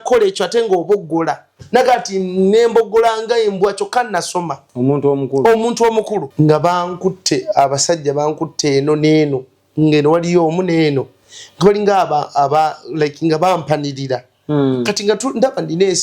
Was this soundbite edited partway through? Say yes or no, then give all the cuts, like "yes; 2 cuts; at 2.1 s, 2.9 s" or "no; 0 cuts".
yes; 1 cut; at 6.3 s